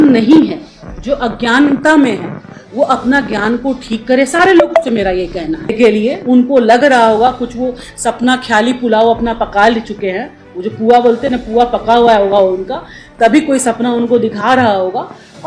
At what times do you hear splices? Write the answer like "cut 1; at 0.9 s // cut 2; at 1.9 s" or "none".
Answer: cut 1; at 5.7 s